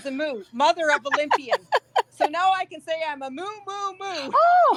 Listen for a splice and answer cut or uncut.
uncut